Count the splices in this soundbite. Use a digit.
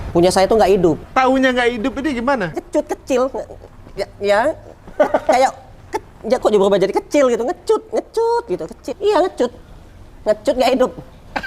3